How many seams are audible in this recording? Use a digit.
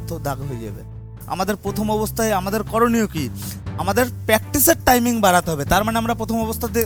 0